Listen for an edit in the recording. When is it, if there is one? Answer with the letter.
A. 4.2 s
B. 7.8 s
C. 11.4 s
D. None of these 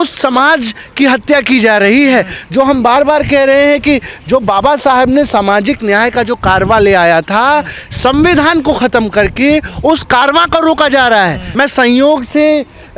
C